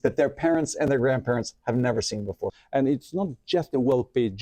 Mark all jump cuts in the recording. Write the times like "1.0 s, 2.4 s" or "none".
2.6 s